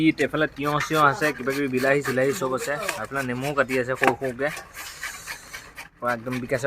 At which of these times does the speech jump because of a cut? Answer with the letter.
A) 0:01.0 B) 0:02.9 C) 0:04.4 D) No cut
D